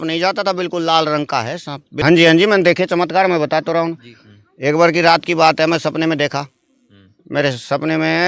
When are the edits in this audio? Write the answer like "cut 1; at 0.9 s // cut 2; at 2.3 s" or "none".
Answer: cut 1; at 1.9 s